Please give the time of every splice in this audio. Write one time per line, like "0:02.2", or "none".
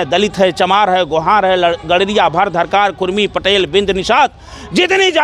none